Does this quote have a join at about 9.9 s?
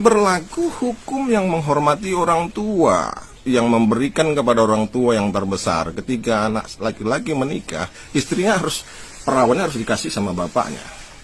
no; 0 cuts

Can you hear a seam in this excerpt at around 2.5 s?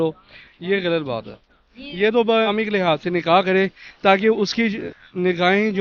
yes; 1 cut; at 2.5 s

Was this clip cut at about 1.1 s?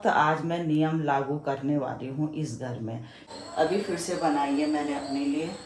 no; 1 cut; at 3.4 s

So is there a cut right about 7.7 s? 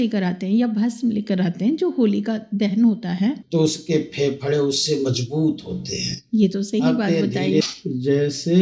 yes; 2 cuts; at 3.4 s, 7.7 s

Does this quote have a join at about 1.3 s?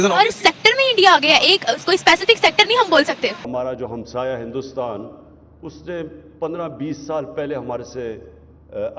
no; 1 cut; at 3.5 s

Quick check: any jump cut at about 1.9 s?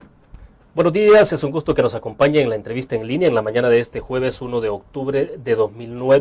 no; 1 cut; at 4.4 s

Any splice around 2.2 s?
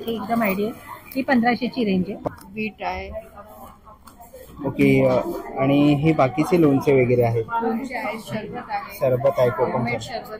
yes; 1 cut; at 2.2 s

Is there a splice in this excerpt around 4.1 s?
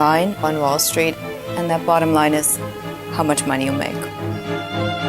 yes; 1 cut; at 4.1 s

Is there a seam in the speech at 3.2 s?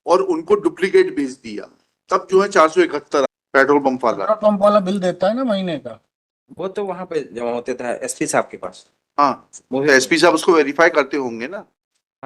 yes; 1 cut; at 3.2 s

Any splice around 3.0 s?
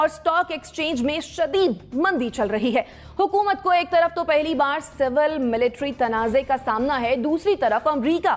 no; 0 cuts

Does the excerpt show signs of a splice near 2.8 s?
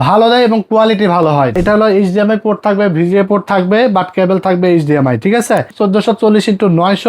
no; 2 cuts; at 1.5 s, 5.7 s

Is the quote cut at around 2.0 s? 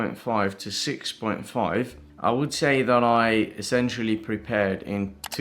yes; 1 cut; at 2.0 s

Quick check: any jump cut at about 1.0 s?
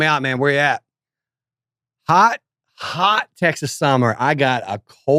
no; 0 cuts

